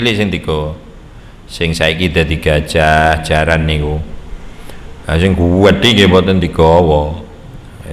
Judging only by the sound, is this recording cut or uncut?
uncut